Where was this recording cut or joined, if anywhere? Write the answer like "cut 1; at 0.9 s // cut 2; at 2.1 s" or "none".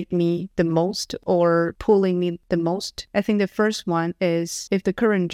none